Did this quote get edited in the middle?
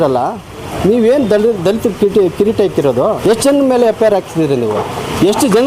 yes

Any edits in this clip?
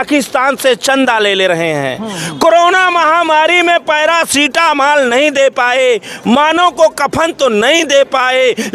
no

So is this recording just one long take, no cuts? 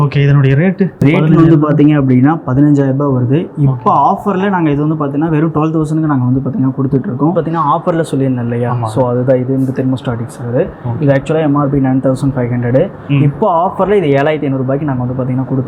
no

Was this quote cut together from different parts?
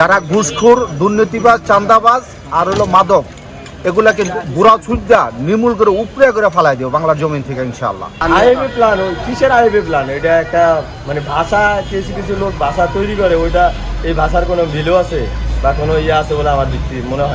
yes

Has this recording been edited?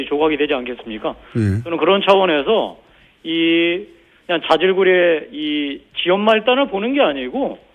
no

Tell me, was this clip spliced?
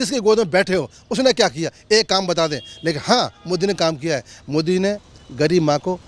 no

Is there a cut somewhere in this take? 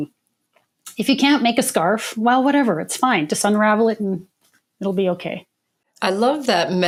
no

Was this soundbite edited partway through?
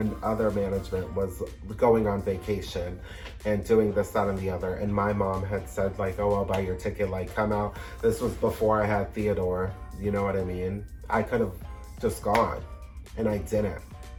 no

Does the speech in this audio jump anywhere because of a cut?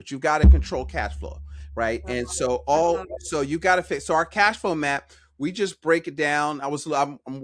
no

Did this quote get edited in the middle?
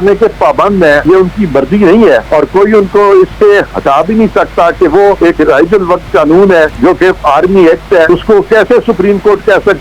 yes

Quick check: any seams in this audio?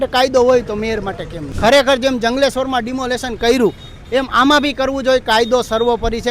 yes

